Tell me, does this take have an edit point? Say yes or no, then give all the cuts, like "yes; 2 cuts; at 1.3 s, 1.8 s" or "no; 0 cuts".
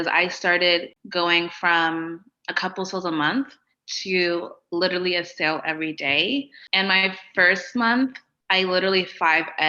yes; 2 cuts; at 1.0 s, 6.6 s